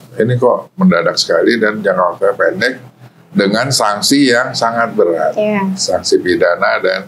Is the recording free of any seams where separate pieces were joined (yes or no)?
yes